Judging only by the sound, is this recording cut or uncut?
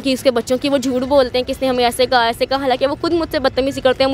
uncut